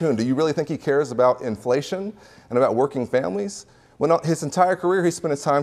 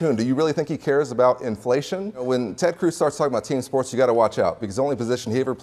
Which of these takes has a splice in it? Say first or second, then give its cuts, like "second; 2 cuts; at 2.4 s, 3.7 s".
second; 1 cut; at 2.3 s